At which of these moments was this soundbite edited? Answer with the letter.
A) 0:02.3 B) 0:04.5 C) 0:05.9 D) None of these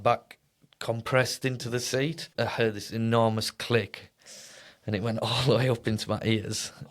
A